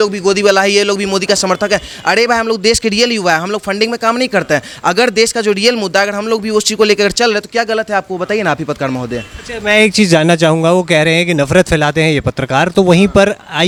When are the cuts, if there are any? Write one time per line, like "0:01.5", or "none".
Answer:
none